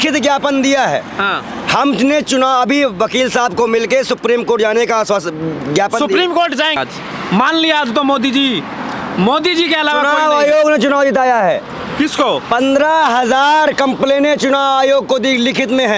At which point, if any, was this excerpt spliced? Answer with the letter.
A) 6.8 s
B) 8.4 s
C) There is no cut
A